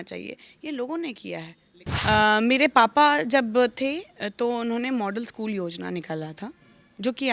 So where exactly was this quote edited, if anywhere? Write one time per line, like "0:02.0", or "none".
0:01.9